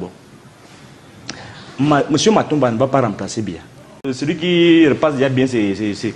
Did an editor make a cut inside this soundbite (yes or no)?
yes